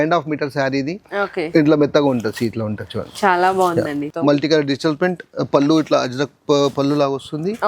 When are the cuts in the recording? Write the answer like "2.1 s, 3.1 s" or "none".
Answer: 4.0 s

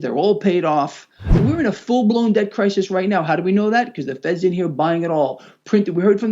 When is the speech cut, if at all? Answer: 1.3 s

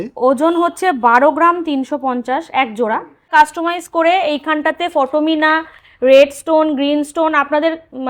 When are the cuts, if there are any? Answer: 3.3 s

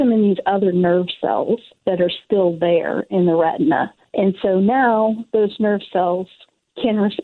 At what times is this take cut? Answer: 1.7 s, 4.0 s

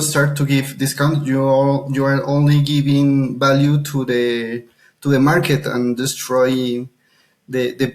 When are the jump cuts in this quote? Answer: none

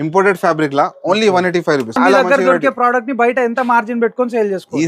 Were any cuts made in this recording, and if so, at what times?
2.0 s

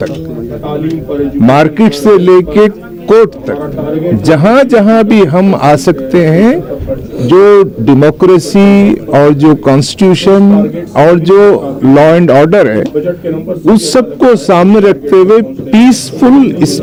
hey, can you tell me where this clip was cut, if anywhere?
none

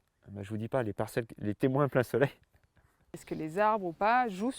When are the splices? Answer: 3.2 s

